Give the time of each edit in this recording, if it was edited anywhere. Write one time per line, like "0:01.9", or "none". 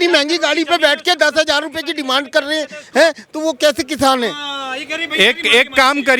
none